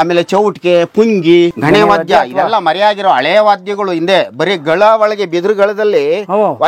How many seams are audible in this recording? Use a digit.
1